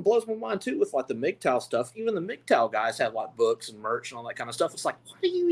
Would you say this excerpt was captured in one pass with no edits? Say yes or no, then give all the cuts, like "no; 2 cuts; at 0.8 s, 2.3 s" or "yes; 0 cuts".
yes; 0 cuts